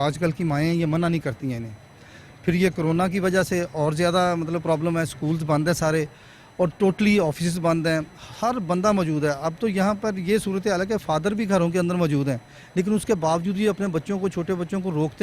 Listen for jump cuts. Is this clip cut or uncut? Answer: uncut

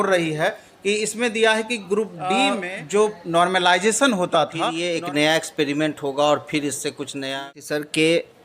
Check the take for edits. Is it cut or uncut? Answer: cut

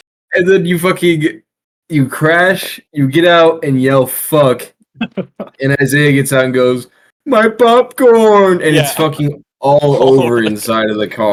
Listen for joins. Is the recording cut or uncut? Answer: uncut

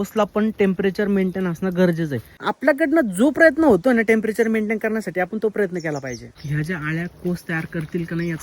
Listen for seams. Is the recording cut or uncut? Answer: cut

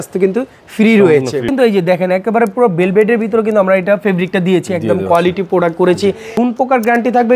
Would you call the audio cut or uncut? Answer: cut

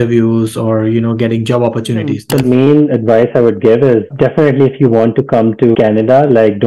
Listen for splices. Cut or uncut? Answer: cut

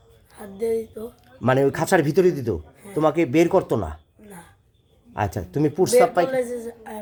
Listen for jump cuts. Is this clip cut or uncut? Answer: uncut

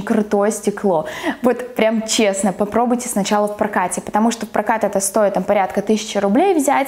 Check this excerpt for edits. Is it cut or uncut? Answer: uncut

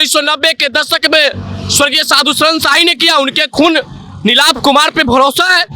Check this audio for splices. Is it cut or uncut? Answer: uncut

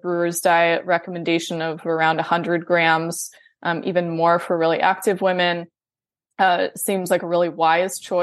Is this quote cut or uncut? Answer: uncut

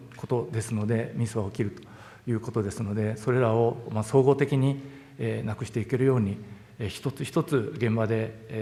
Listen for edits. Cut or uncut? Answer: uncut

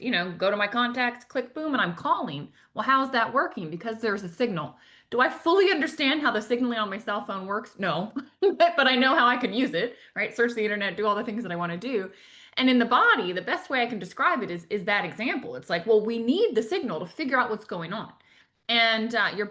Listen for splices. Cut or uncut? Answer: uncut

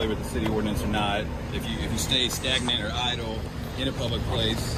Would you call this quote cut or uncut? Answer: uncut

